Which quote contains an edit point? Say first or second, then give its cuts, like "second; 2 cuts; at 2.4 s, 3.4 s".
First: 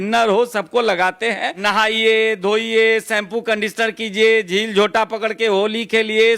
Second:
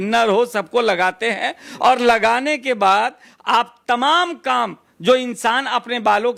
first; 1 cut; at 1.5 s